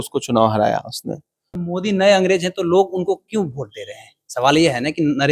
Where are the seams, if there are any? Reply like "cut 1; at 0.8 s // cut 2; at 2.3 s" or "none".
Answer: cut 1; at 1.6 s